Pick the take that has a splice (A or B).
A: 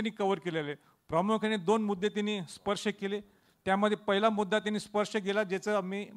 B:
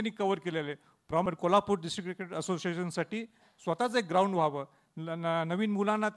B